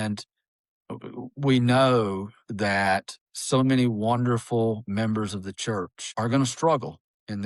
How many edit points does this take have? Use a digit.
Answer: 1